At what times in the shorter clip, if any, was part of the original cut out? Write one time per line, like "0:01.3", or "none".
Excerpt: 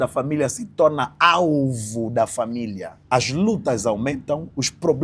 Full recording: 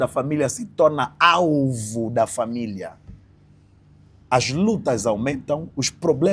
0:02.9